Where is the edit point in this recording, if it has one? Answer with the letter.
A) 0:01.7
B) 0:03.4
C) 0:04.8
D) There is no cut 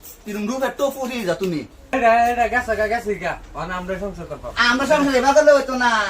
A